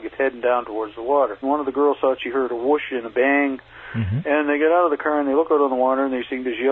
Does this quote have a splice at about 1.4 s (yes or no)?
yes